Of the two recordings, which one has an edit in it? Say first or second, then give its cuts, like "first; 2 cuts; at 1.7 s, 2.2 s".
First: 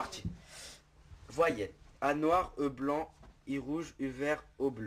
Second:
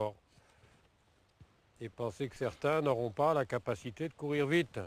first; 1 cut; at 2.6 s